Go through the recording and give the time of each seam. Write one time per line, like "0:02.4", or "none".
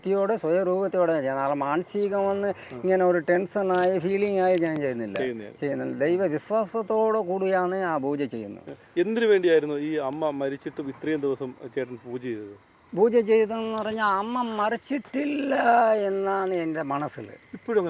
none